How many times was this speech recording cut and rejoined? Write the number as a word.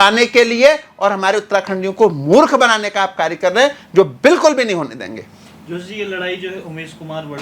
zero